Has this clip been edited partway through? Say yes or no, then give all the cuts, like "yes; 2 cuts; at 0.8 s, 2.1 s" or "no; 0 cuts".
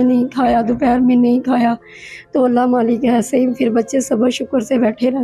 no; 0 cuts